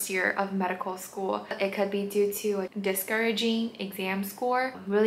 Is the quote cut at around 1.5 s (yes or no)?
no